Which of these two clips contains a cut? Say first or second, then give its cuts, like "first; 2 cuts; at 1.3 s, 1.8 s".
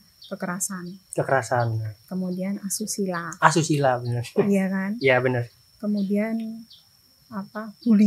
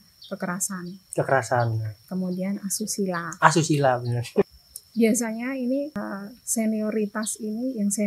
second; 2 cuts; at 4.5 s, 6.0 s